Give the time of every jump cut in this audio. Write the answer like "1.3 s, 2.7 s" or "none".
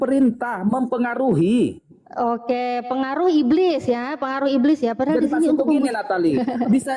none

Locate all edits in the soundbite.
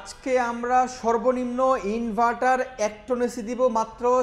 none

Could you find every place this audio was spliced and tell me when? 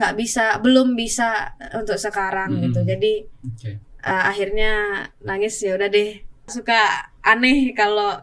6.6 s

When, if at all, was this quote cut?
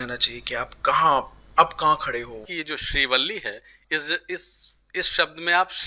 2.5 s

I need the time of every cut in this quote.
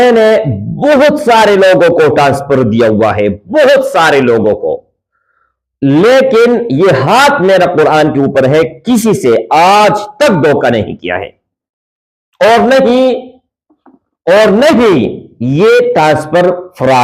none

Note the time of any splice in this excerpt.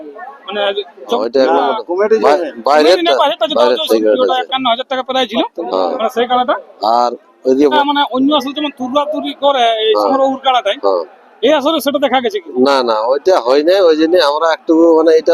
1.2 s, 3.8 s, 7.7 s

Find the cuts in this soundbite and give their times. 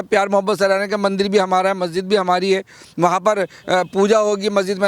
none

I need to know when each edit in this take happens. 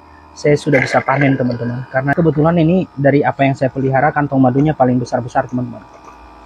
2.1 s

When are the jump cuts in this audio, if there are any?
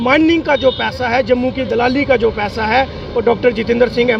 none

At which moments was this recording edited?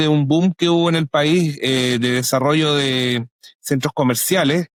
none

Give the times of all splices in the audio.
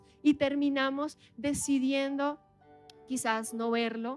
none

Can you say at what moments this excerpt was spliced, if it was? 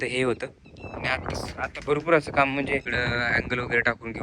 2.9 s

